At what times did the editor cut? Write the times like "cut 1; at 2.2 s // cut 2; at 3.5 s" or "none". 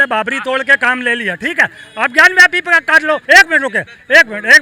cut 1; at 3.2 s